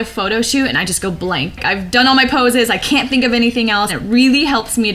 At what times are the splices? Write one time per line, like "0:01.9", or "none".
0:01.6
0:04.0

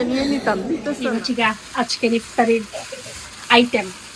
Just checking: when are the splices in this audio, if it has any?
0:01.0

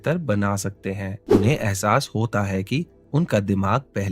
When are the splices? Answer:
0:01.3

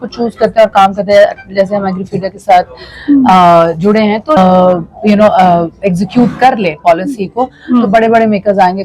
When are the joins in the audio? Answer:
0:04.4

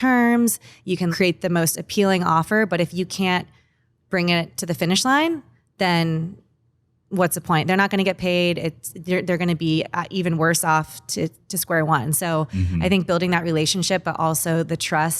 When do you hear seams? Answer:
0:01.1

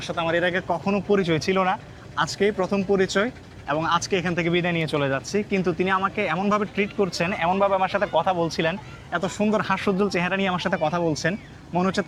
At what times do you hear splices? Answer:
none

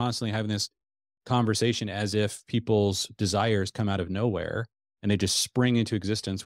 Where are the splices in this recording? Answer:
none

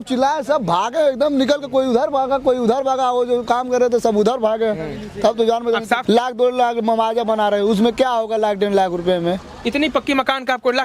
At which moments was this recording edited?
0:06.0

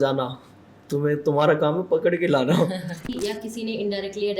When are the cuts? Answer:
0:03.1

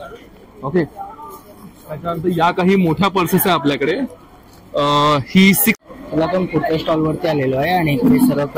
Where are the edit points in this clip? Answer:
0:05.8

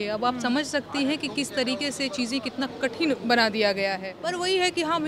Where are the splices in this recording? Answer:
0:04.1

